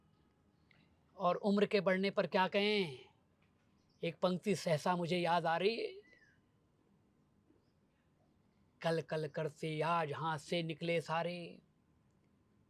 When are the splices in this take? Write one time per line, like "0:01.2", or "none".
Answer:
none